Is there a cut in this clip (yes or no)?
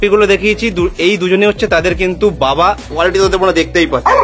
yes